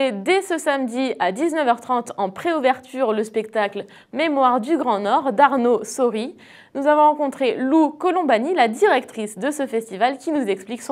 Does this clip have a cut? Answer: yes; 1 cut; at 7.7 s

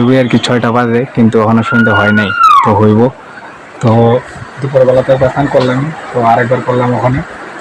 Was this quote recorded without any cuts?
yes; 0 cuts

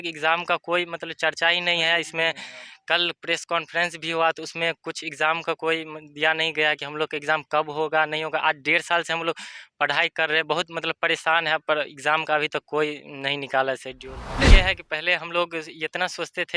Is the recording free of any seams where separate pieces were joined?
no; 1 cut; at 14.5 s

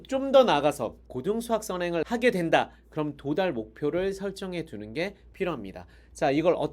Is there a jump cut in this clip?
yes; 2 cuts; at 1.0 s, 2.0 s

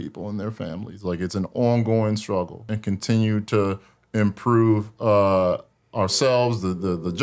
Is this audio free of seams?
no; 1 cut; at 2.6 s

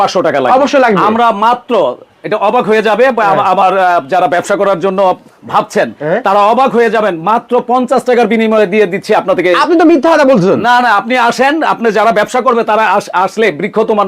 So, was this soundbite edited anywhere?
no; 0 cuts

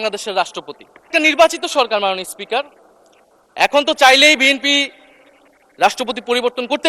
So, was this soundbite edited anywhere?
yes; 1 cut; at 1.1 s

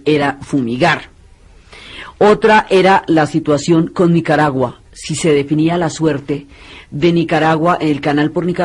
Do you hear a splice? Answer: yes; 1 cut; at 4.5 s

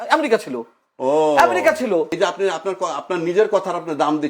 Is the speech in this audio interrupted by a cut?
yes; 1 cut; at 2.1 s

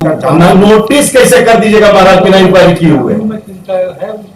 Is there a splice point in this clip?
no; 0 cuts

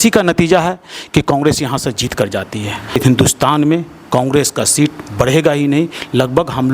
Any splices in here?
yes; 1 cut; at 3.0 s

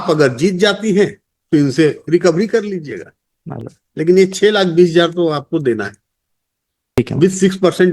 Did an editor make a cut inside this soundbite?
yes; 1 cut; at 7.0 s

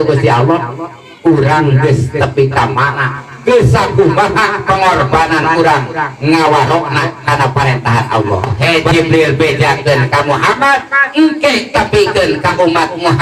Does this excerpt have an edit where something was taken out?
yes; 1 cut; at 8.5 s

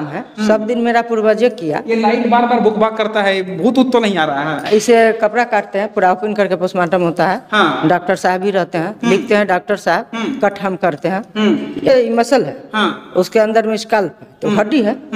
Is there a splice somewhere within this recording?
yes; 2 cuts; at 4.7 s, 11.9 s

